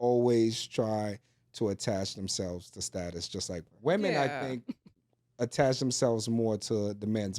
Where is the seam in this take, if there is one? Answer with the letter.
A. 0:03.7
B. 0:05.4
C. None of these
A